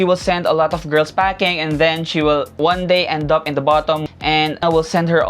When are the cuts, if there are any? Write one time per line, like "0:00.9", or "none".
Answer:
0:02.5
0:04.0